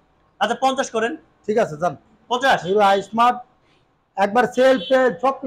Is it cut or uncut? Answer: uncut